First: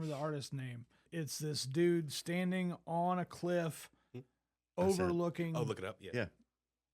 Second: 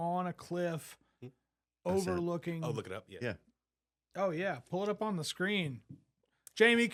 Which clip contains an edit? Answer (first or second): first